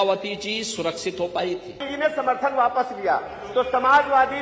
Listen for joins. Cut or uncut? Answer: cut